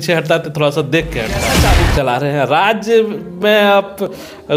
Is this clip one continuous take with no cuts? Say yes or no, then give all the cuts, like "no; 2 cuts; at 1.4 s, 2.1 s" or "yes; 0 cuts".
no; 1 cut; at 1.5 s